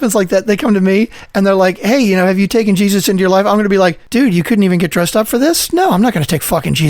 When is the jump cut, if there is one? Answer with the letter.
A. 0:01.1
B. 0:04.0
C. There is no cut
B